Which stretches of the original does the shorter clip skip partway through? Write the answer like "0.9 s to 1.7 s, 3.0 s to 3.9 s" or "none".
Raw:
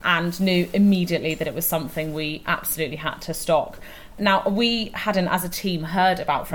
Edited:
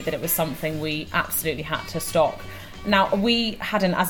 none